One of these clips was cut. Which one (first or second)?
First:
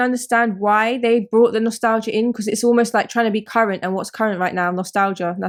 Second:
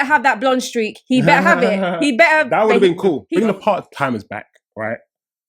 second